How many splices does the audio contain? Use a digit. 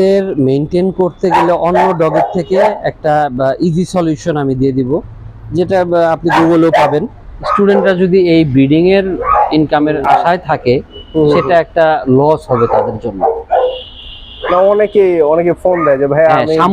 1